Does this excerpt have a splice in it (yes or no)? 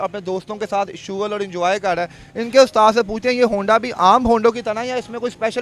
no